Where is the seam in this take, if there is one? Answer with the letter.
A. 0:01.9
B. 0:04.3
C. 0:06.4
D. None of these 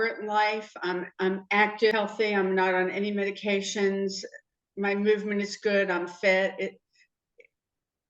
A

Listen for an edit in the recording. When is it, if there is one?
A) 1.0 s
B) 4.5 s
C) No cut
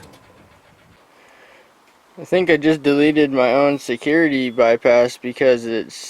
A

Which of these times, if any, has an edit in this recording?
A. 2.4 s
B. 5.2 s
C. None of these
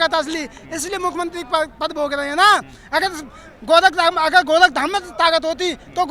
C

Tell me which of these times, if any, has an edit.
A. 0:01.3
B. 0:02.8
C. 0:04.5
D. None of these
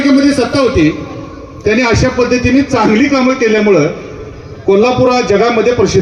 D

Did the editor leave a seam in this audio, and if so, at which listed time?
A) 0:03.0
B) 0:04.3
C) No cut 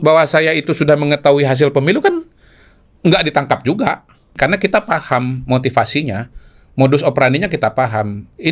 B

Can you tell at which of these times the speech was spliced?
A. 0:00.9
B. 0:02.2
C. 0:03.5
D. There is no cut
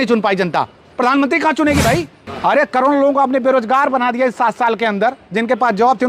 B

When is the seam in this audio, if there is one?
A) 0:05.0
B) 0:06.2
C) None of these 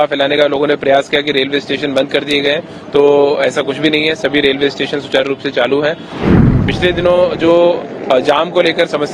B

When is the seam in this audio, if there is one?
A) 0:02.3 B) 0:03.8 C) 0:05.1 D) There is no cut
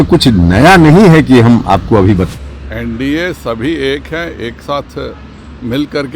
A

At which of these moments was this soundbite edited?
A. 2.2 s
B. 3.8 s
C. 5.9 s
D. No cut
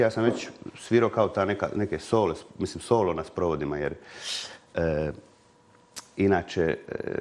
D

